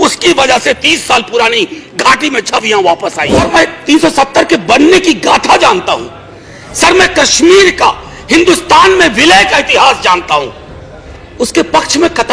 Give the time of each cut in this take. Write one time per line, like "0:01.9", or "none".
0:03.4
0:11.1